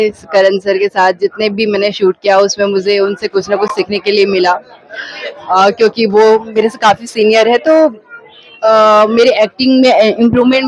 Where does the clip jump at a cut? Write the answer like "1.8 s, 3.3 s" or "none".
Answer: none